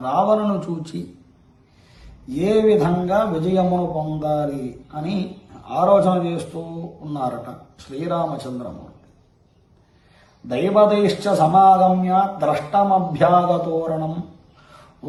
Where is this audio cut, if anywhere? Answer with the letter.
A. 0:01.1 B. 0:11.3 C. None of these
C